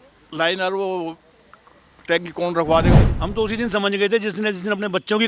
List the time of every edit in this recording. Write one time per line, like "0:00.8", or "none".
0:03.0